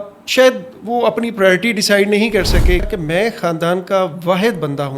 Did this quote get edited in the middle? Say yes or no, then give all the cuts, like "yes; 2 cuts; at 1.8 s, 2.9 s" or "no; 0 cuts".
yes; 1 cut; at 2.9 s